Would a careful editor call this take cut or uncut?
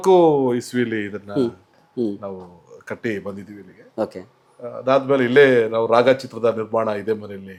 uncut